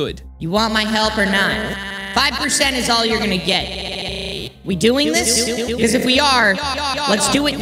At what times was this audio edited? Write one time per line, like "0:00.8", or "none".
none